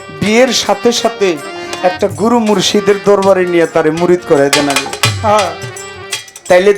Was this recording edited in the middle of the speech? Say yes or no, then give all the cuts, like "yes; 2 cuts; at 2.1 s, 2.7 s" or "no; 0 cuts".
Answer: no; 0 cuts